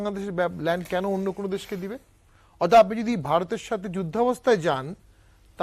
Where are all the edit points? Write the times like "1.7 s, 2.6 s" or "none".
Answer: none